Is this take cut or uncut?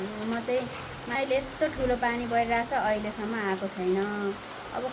cut